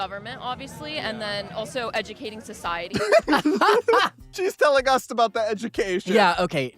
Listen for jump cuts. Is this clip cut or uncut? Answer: cut